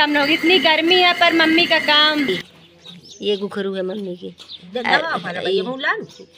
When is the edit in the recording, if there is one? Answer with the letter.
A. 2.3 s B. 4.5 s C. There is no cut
A